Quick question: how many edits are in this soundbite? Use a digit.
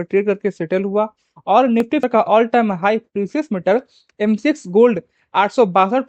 1